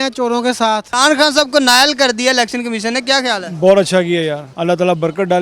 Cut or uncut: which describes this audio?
cut